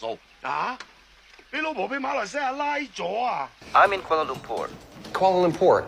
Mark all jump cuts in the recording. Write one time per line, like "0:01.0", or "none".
none